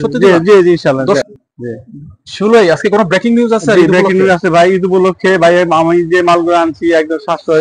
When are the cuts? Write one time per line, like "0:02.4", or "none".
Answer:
0:01.2